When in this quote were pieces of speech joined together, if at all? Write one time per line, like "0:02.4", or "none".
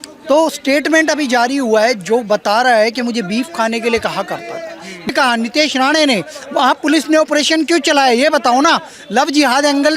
0:05.1

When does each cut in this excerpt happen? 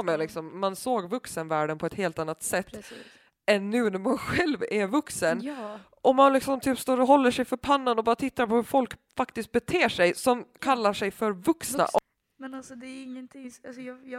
0:12.0

